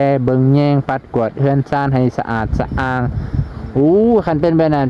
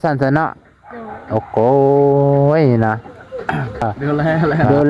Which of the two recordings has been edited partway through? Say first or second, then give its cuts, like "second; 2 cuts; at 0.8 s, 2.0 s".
second; 1 cut; at 3.8 s